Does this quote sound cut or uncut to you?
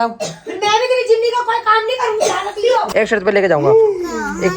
cut